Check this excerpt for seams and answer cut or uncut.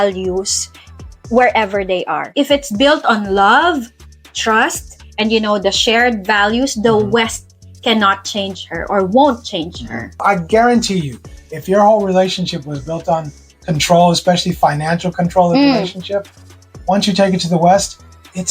cut